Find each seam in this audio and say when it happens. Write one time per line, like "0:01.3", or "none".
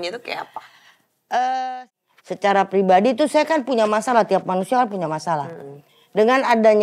0:01.8

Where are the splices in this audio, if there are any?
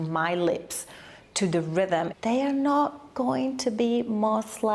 0:02.1

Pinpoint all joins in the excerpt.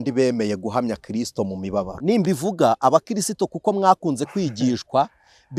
0:01.9

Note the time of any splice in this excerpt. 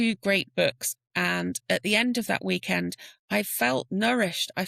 0:00.9

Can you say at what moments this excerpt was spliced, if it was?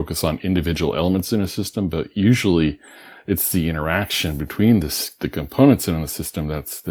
none

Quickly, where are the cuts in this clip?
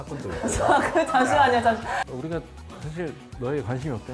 0:02.0

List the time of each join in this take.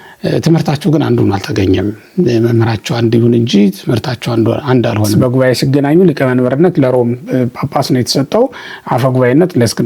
0:05.1

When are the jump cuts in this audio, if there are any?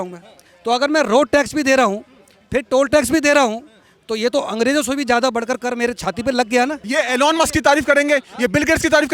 0:06.8

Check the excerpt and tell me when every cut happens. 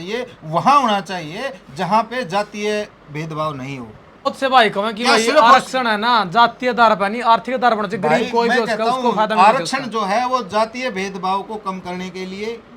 0:04.3

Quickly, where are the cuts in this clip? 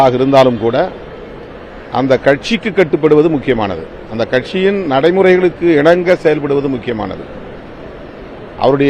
none

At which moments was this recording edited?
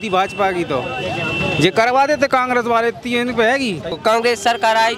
0:03.9

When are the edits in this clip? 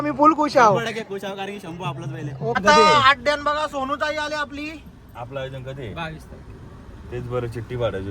0:02.5

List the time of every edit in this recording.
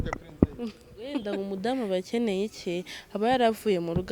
0:01.3

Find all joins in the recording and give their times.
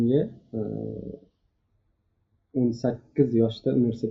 none

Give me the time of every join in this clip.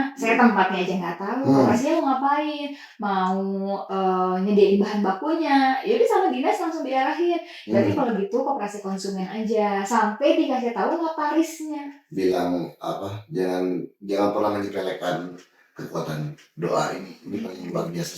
0:01.9
0:12.0

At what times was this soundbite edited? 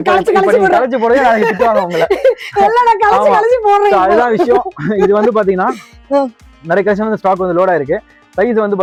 none

